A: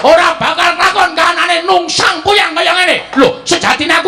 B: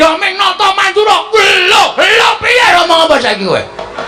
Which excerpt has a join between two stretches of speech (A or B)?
B